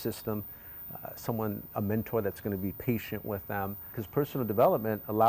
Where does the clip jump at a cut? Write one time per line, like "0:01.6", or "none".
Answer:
0:04.0